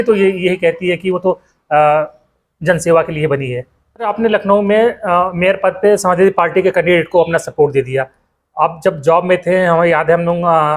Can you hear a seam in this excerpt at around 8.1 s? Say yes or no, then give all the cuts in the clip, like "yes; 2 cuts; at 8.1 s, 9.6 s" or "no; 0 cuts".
no; 1 cut; at 4.1 s